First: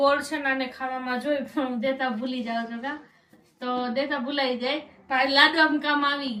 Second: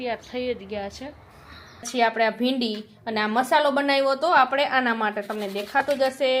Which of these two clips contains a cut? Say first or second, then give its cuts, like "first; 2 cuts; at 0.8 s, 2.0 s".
second; 1 cut; at 1.9 s